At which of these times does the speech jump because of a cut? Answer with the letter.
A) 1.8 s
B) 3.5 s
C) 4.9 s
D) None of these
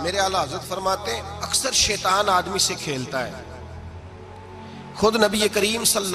C